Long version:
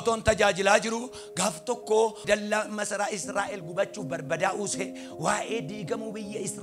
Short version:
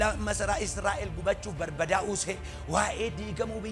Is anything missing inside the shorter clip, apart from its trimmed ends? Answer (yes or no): no